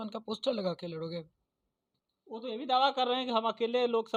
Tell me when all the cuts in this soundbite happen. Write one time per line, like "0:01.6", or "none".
none